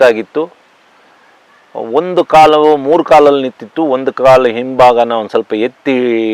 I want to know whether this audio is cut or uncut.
uncut